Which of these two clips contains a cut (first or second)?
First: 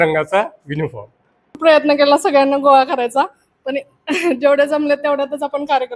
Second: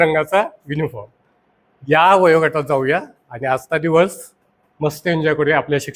first